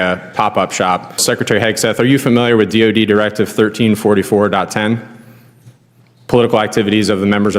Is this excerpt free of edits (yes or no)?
no